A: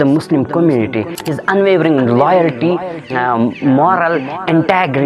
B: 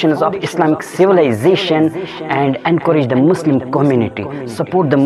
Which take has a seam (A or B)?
A